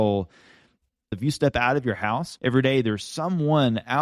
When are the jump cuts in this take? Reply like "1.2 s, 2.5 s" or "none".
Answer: 1.1 s, 2.3 s